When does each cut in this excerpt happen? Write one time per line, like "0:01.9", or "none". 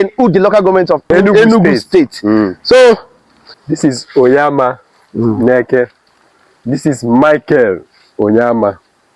0:01.1
0:03.6